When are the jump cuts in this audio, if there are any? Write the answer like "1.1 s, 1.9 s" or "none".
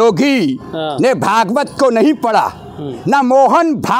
none